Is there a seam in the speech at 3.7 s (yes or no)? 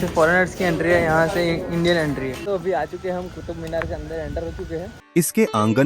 no